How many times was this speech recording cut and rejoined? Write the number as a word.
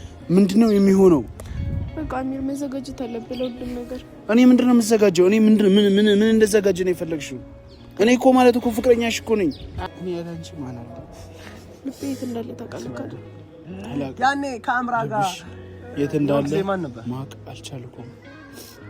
one